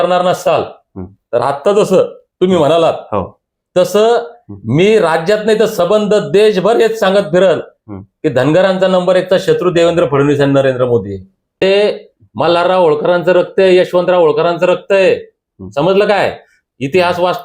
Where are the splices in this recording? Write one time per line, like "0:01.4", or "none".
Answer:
0:11.6